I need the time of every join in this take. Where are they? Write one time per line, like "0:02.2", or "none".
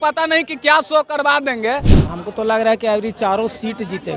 0:02.0